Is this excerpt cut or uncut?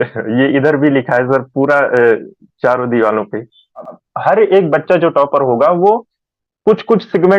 cut